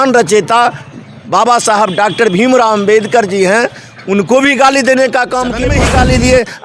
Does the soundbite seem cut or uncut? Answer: cut